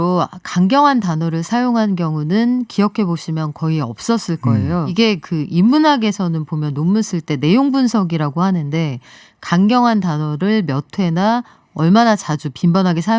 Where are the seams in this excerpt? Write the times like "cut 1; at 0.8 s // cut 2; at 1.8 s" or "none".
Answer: cut 1; at 4.9 s